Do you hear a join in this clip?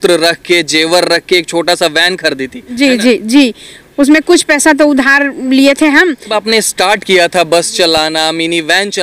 yes; 1 cut; at 6.3 s

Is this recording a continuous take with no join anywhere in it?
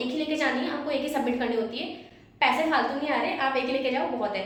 yes; 0 cuts

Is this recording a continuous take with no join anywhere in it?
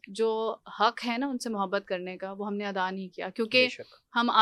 yes; 0 cuts

